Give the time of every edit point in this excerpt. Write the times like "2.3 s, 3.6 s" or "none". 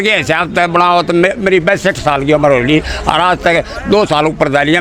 none